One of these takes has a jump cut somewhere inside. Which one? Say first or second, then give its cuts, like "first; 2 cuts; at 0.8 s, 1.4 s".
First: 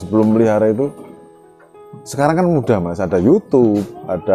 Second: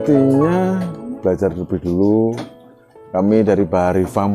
second; 1 cut; at 1.1 s